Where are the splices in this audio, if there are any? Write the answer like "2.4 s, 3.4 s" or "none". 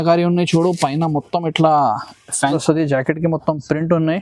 2.4 s

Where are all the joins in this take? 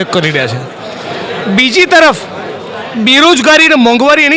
none

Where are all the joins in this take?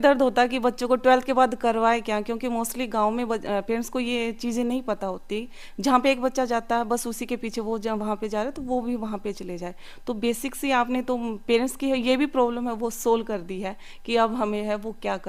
none

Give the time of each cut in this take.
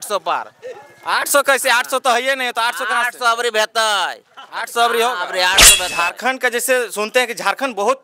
5.8 s

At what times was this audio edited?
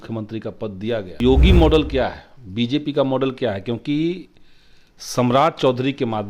1.2 s

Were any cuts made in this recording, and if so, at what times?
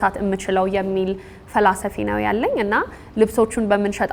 none

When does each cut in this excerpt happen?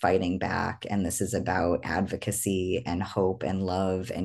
none

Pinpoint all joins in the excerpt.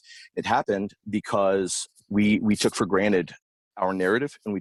none

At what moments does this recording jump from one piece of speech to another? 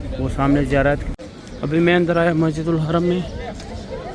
1.1 s

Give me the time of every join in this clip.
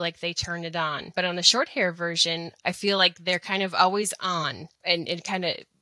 1.1 s, 2.5 s, 4.7 s

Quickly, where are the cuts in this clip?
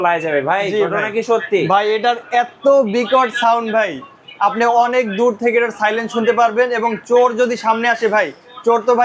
none

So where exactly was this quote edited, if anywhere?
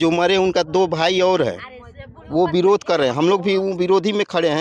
none

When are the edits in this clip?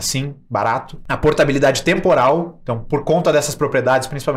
1.0 s

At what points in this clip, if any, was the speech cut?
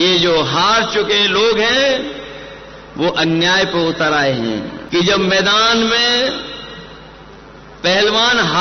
4.8 s

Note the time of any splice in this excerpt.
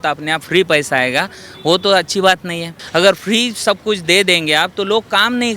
2.7 s

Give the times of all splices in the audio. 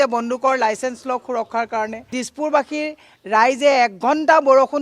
2.2 s

